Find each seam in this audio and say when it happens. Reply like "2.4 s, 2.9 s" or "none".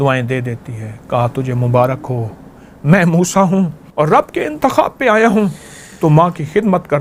3.8 s